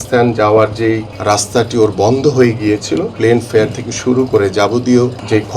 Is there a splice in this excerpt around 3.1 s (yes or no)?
yes